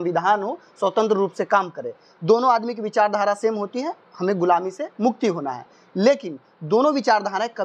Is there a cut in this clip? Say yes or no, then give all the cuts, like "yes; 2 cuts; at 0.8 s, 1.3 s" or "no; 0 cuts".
no; 0 cuts